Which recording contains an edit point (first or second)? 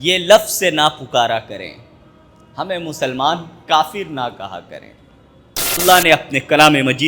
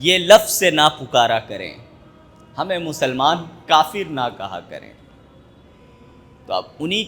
first